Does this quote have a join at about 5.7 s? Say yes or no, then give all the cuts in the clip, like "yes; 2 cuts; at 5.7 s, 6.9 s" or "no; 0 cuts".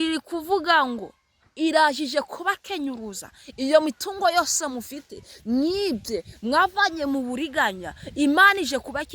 no; 0 cuts